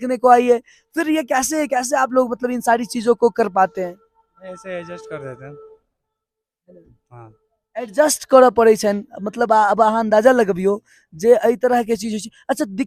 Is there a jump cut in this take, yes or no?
no